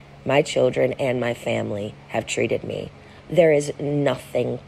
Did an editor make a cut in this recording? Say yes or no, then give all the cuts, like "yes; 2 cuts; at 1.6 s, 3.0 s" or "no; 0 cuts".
no; 0 cuts